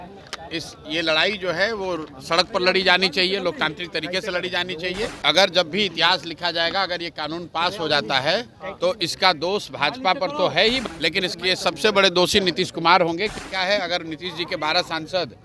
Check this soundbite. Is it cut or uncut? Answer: cut